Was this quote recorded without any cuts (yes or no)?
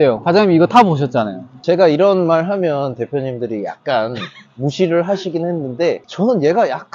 yes